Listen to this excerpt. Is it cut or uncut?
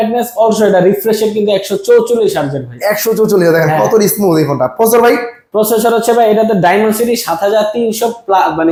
uncut